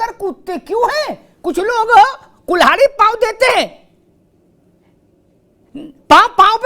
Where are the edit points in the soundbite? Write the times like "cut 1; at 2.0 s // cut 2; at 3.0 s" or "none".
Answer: none